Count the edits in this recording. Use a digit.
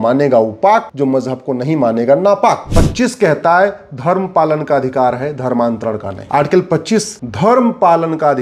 4